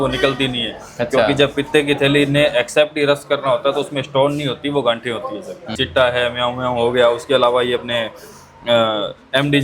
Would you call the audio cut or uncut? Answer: cut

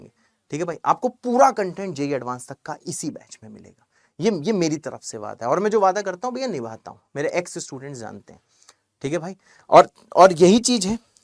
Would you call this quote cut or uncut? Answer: uncut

